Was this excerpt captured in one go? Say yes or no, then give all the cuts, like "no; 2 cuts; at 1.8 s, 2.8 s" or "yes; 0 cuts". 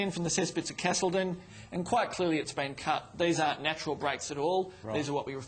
yes; 0 cuts